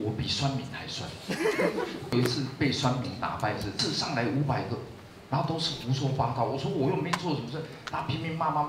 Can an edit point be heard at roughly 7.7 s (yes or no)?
no